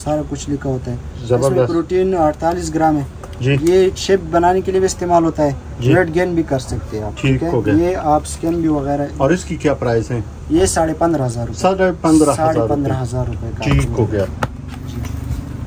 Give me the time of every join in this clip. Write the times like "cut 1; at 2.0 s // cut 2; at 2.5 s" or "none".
none